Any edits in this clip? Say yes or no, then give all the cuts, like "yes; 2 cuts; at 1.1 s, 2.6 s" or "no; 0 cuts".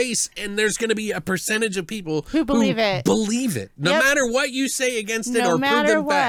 no; 0 cuts